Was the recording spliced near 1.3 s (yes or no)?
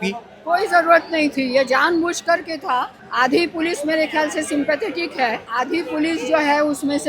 no